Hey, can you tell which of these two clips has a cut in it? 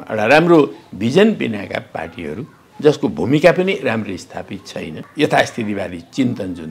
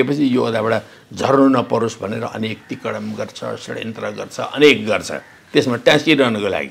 first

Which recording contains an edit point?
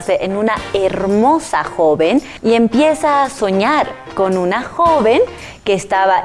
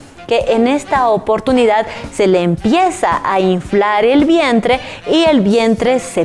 first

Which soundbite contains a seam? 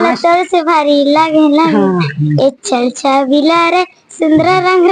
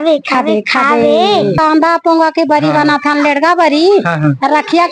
second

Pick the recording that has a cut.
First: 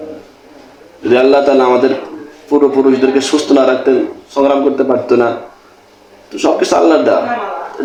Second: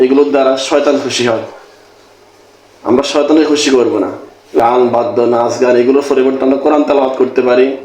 second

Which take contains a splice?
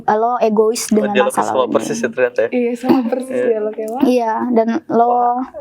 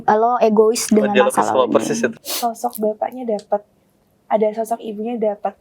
second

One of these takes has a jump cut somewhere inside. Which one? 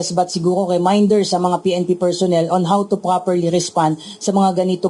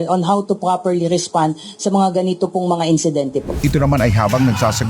second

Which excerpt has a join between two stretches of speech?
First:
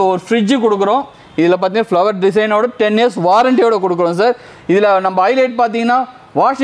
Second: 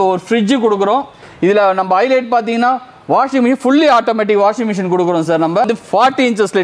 second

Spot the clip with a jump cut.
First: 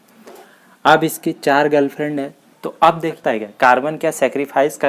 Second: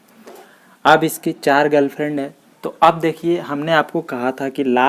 first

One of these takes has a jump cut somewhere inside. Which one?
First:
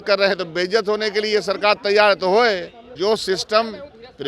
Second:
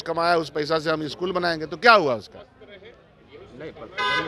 first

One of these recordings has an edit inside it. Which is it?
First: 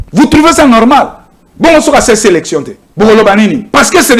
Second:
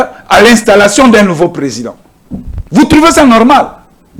first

